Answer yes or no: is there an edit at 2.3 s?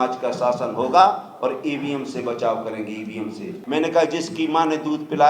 no